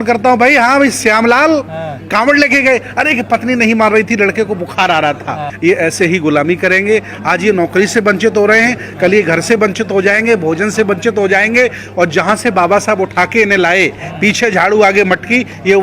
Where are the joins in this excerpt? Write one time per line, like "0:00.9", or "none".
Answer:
0:05.5

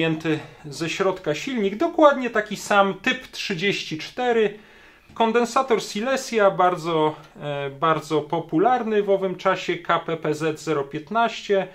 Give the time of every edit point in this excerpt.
0:05.1

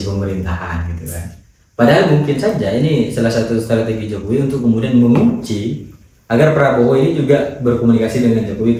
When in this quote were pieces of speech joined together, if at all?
none

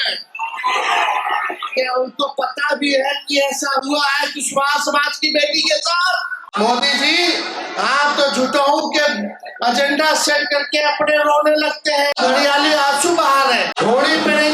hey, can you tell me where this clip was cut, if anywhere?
0:06.4
0:12.2
0:13.7

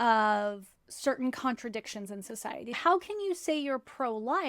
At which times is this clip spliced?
0:02.8

